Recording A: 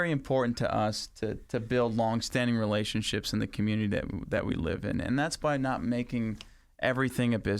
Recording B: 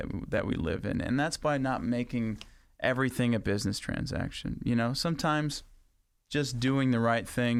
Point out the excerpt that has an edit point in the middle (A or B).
A